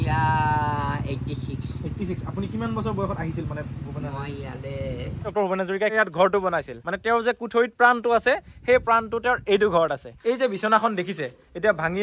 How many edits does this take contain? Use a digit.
2